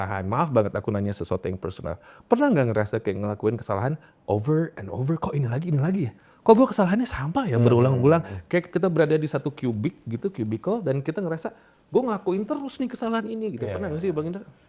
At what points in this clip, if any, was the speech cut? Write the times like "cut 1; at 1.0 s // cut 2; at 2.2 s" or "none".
none